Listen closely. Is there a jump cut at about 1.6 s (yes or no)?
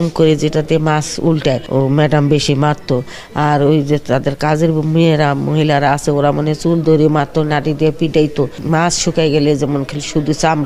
yes